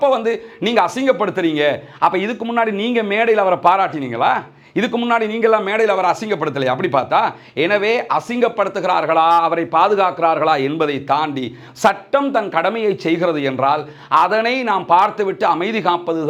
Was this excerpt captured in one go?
yes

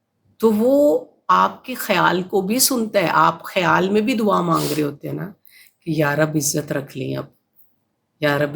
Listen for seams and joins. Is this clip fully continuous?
yes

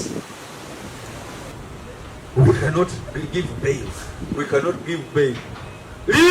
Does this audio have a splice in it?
yes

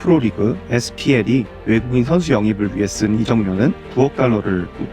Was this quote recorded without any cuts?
yes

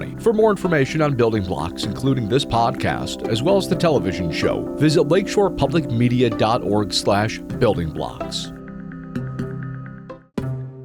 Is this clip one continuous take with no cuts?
no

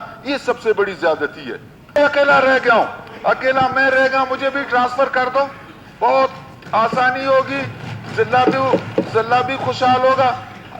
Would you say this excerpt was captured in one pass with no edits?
no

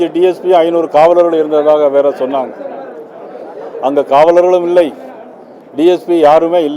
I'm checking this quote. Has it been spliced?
no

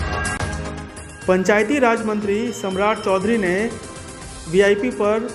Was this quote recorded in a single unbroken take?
no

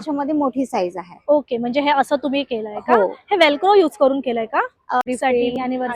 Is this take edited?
yes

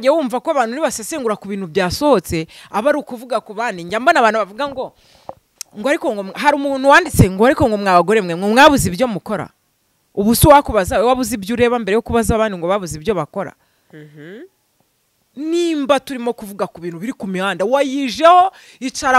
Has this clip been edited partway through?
no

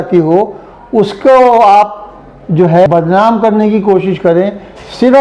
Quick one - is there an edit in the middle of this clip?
yes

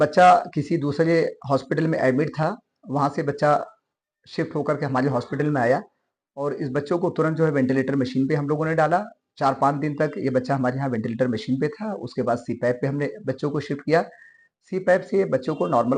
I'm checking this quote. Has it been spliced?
no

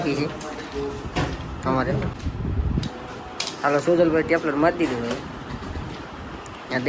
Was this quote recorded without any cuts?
no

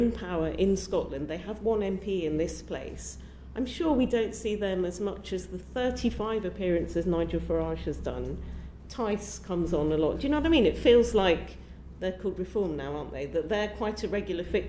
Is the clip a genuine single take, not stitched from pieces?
yes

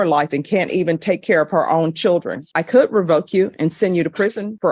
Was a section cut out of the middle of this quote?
yes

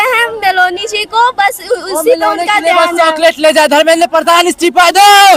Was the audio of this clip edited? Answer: no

